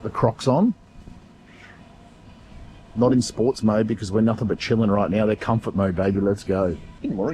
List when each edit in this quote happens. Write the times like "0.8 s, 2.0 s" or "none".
none